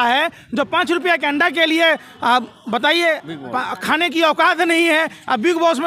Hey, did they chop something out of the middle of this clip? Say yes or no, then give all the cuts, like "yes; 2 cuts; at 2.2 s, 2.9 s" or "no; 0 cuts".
no; 0 cuts